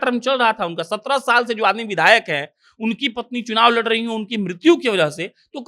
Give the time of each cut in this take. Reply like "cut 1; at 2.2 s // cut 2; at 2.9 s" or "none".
none